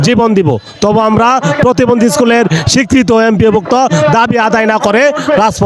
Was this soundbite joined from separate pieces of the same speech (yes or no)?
no